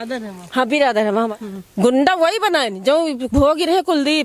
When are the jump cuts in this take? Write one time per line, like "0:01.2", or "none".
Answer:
0:01.3

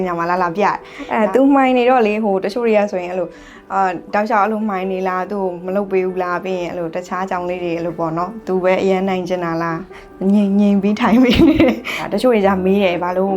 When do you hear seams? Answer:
0:00.9
0:12.0

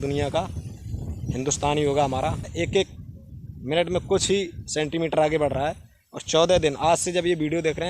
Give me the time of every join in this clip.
0:02.4

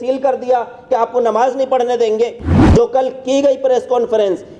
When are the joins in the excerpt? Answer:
0:02.5

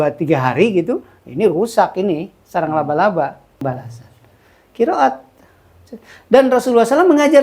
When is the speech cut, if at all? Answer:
0:03.6

